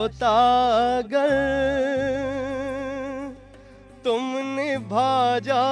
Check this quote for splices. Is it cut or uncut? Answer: uncut